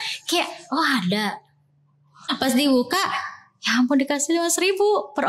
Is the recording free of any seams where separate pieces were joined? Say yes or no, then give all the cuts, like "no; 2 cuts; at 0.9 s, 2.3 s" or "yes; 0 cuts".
no; 1 cut; at 2.1 s